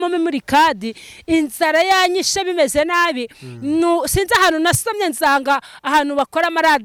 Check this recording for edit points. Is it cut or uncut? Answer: uncut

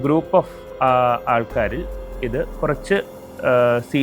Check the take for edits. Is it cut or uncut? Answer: uncut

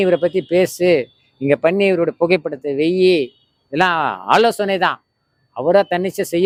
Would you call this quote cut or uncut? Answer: uncut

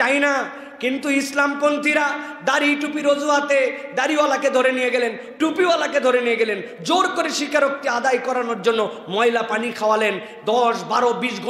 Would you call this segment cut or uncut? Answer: uncut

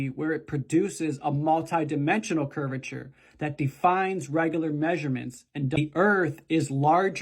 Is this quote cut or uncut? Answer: cut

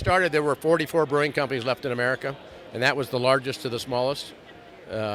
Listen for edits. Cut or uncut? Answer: uncut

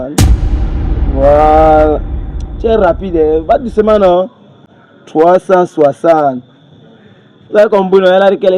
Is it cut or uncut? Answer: uncut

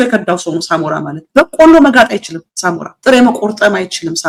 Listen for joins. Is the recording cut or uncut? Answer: uncut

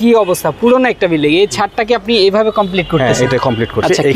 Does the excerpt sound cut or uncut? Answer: uncut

